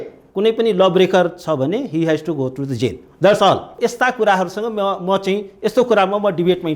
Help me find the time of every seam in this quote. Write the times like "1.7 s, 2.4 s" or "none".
3.8 s